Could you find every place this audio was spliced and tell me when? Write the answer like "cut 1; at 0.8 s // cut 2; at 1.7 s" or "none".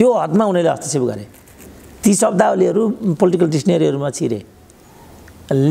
none